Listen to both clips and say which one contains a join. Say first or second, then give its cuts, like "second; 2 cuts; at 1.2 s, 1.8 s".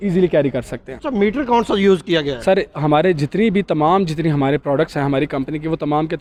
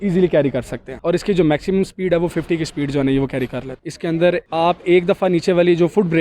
second; 2 cuts; at 0.9 s, 3.8 s